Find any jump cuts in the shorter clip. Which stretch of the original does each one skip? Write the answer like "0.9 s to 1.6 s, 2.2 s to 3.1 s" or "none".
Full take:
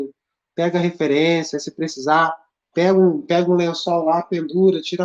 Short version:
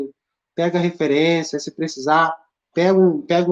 none